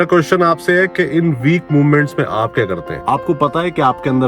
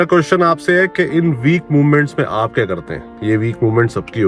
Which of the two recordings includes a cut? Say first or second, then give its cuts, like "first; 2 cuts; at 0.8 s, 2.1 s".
first; 1 cut; at 2.9 s